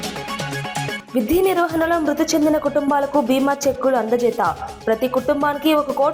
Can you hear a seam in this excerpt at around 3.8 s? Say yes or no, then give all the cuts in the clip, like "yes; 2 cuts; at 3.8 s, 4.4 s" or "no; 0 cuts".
no; 1 cut; at 1.0 s